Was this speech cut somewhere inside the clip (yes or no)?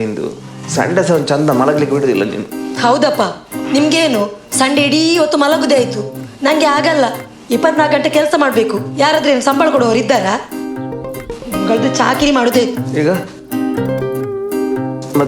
no